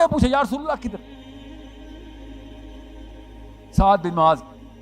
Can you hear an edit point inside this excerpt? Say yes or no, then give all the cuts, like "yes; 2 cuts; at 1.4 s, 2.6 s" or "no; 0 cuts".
yes; 2 cuts; at 1.0 s, 3.1 s